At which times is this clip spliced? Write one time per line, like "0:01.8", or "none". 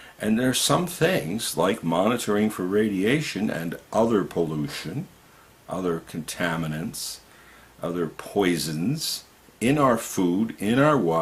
0:08.2